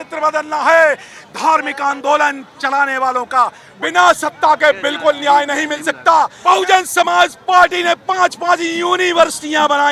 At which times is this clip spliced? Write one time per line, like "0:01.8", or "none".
0:03.6
0:06.3

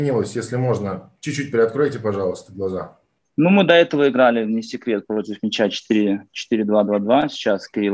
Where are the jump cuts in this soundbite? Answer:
none

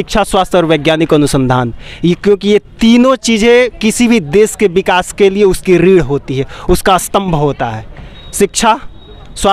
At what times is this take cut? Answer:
none

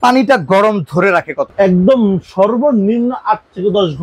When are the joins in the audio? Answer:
0:01.4

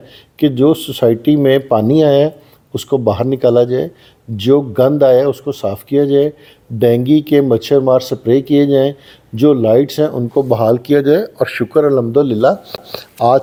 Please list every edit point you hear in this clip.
none

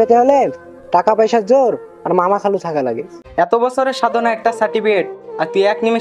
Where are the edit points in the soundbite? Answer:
0:03.2

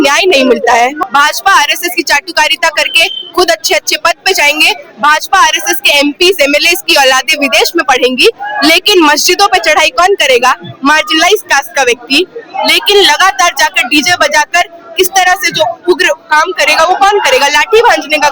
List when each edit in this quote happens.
0:01.0

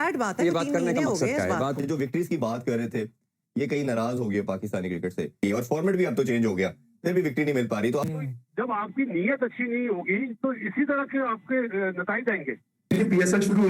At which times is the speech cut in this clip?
0:01.8
0:05.3
0:12.8

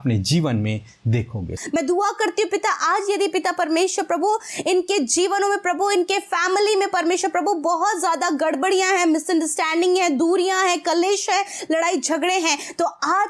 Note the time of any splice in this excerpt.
0:01.6

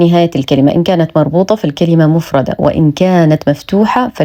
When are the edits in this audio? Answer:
none

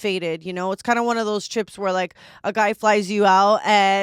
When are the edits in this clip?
none

